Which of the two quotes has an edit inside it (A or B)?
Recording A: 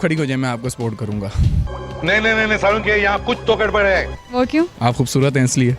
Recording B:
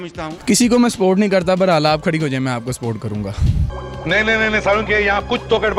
A